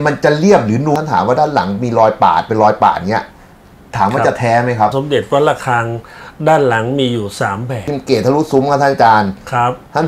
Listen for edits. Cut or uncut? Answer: cut